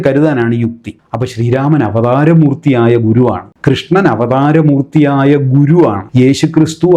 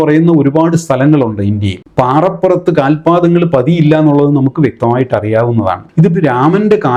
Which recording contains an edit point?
first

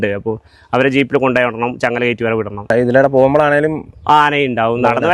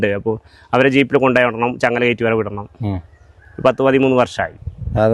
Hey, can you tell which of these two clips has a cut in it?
first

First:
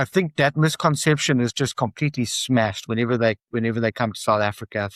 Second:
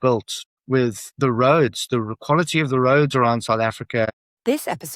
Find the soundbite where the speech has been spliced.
second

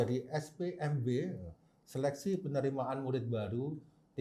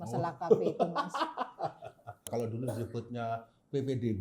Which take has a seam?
second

